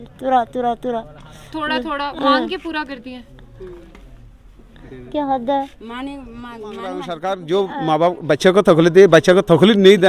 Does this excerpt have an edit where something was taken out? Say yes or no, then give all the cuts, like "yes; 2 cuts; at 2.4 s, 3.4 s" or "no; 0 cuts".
yes; 1 cut; at 7.1 s